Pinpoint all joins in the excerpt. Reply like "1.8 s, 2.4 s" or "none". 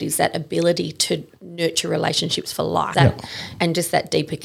2.9 s